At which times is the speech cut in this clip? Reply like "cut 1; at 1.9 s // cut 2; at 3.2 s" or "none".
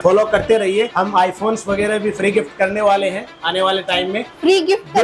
cut 1; at 0.9 s